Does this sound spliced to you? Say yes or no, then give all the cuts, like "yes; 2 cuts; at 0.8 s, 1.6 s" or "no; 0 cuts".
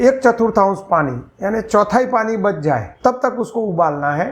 yes; 1 cut; at 2.9 s